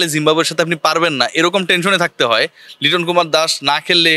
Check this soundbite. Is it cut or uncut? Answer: uncut